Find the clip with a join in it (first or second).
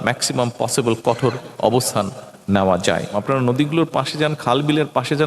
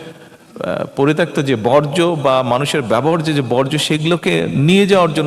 first